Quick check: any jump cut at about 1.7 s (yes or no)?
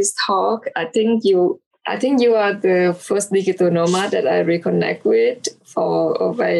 yes